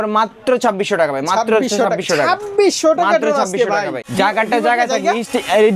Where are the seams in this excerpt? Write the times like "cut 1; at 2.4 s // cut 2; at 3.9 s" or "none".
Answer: cut 1; at 4.0 s